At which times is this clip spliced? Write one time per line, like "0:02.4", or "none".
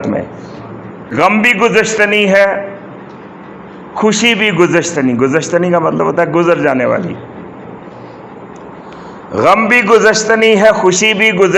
0:01.1